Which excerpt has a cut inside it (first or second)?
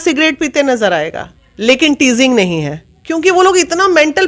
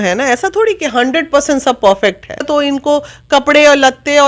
second